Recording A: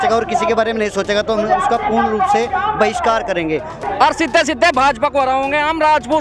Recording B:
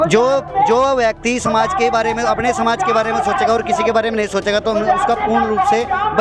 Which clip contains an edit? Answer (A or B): A